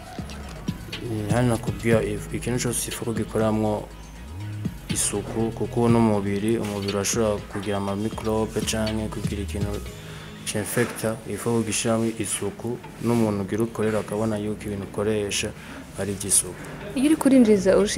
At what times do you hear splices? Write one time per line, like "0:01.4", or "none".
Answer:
none